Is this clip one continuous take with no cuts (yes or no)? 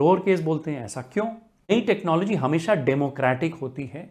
no